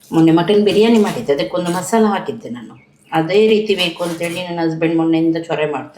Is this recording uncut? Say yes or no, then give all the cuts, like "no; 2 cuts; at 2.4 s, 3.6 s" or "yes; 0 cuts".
yes; 0 cuts